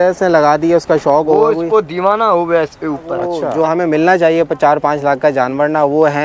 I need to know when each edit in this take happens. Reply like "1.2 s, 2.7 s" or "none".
3.4 s